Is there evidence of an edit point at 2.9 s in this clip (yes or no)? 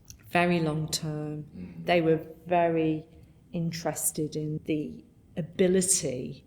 no